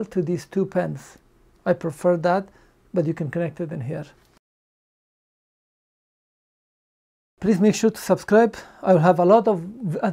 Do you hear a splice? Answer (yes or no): no